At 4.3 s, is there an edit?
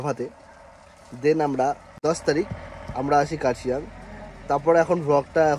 no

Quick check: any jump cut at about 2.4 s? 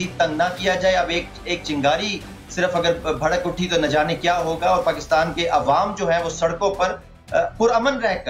no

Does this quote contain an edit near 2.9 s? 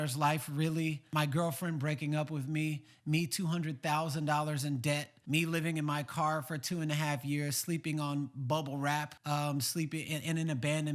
no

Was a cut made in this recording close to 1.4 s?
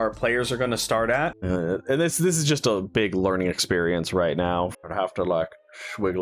yes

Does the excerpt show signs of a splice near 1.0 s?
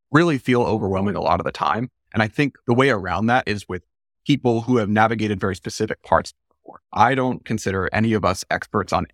no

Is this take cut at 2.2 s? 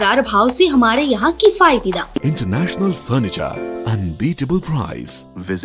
yes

